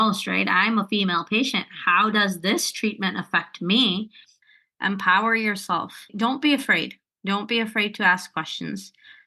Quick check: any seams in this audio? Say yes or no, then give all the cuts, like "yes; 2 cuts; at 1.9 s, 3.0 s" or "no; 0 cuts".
yes; 2 cuts; at 4.4 s, 6.1 s